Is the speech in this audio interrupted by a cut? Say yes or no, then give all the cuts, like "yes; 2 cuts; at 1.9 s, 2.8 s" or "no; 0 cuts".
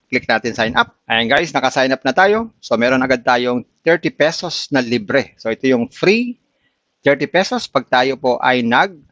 no; 0 cuts